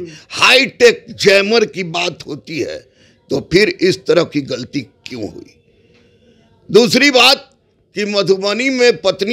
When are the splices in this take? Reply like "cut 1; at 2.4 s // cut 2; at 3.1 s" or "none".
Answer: none